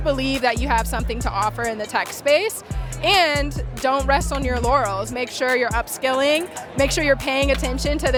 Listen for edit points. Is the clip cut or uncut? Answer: uncut